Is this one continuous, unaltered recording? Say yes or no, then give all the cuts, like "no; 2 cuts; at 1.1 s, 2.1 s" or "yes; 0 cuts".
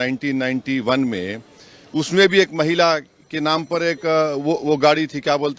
yes; 0 cuts